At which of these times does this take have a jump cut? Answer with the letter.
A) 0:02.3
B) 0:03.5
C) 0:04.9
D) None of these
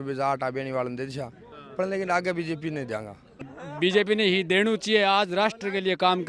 B